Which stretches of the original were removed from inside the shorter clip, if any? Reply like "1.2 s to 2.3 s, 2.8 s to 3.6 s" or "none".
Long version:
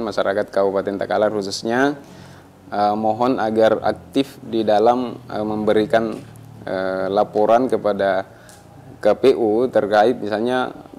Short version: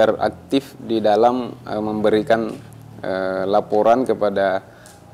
none